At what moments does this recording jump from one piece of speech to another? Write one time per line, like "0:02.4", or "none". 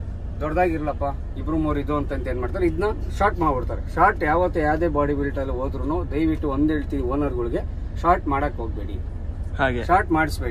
none